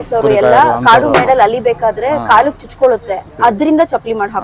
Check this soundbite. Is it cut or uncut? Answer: cut